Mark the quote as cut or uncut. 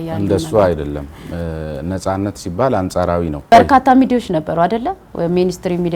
cut